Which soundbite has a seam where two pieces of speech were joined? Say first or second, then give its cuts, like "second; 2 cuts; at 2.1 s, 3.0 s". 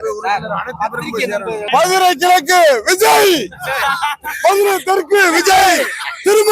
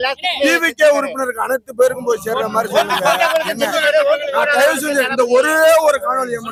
first; 1 cut; at 1.6 s